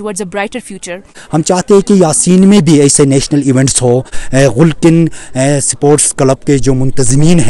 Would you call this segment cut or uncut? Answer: cut